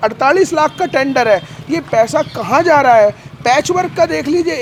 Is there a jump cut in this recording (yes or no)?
no